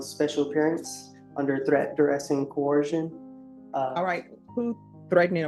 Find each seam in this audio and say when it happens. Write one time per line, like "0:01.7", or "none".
none